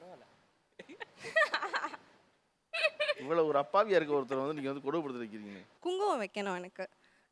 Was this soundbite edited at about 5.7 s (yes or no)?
yes